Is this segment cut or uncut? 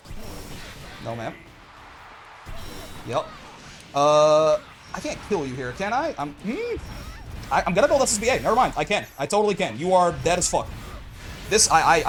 uncut